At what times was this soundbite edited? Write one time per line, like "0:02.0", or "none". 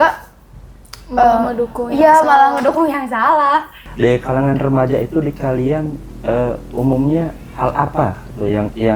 0:03.8